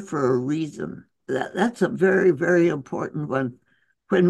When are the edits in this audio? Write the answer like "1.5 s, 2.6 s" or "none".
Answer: 1.2 s